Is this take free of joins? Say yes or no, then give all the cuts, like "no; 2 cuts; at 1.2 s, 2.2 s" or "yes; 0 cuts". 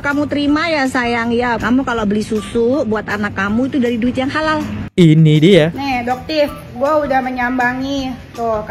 no; 2 cuts; at 1.6 s, 4.8 s